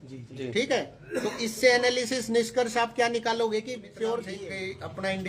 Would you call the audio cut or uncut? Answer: cut